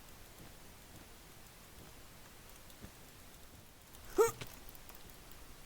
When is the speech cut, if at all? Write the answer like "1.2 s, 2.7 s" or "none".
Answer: 3.7 s